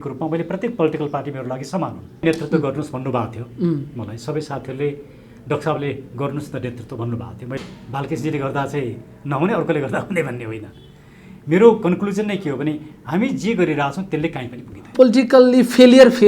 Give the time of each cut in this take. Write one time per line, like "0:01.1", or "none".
0:02.2
0:07.6
0:14.9